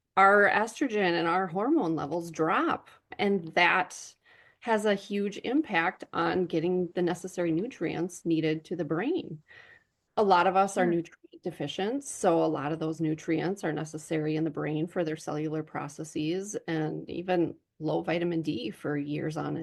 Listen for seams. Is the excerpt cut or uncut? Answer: uncut